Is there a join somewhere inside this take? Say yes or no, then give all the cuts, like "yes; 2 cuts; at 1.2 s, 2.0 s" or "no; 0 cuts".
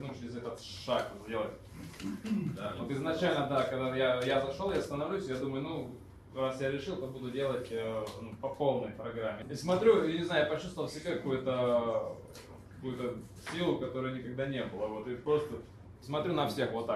no; 0 cuts